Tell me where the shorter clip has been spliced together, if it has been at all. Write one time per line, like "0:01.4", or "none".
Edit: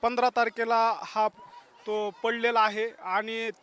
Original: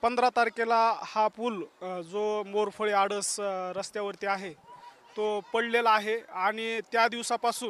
0:01.4